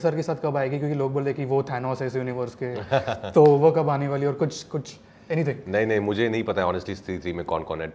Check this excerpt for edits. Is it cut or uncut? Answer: uncut